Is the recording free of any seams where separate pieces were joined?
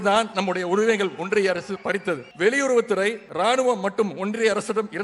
no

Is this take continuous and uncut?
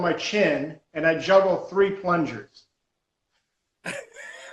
yes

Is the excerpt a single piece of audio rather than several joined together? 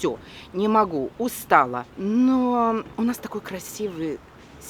no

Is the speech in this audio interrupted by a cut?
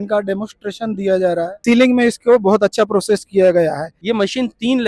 yes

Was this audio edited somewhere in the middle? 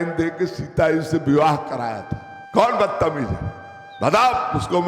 yes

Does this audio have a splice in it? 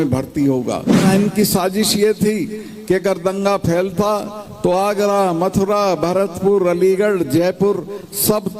yes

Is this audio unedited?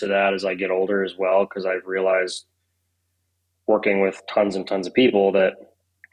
yes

